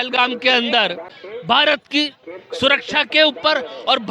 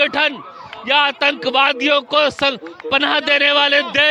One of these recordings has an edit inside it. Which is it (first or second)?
first